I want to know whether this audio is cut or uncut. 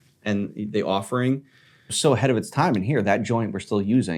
cut